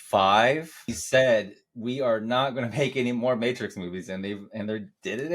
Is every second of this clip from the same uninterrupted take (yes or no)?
no